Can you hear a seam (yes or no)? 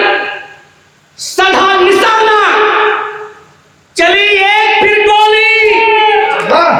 no